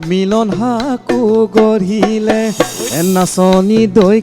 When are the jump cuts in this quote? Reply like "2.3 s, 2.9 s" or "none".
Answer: 2.9 s